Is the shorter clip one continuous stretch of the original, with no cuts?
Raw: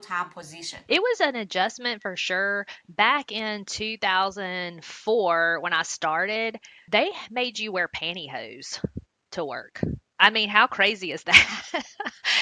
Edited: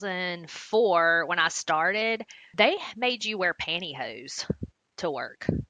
yes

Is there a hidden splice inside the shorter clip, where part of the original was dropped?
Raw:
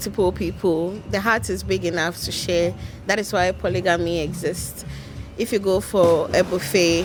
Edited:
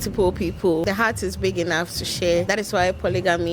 yes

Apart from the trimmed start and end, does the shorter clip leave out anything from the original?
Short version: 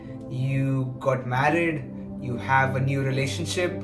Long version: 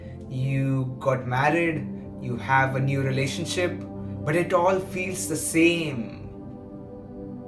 no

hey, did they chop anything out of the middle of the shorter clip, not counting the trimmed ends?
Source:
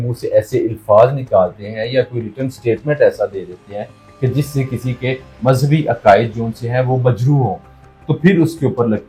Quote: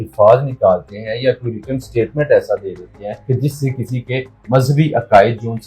yes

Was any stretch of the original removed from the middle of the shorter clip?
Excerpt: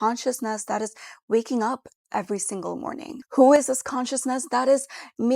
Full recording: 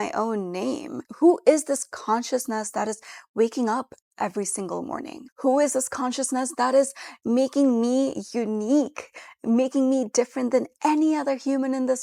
no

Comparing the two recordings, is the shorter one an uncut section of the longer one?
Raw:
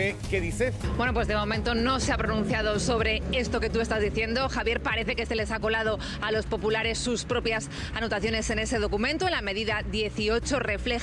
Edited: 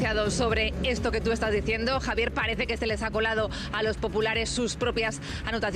yes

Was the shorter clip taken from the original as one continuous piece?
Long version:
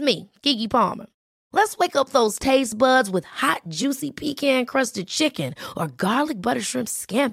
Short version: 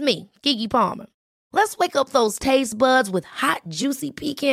yes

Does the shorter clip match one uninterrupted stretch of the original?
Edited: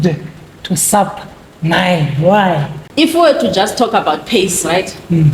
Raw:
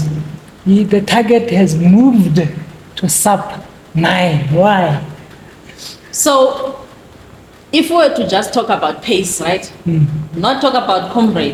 no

